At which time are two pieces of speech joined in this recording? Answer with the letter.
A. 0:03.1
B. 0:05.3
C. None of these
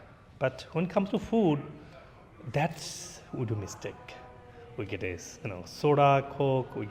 C